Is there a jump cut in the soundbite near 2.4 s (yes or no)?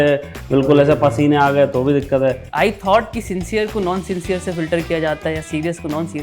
yes